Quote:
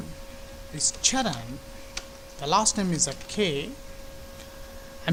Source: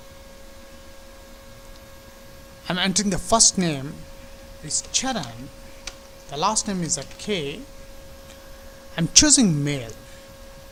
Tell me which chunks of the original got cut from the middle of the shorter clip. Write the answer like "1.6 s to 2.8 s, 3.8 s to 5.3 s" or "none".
none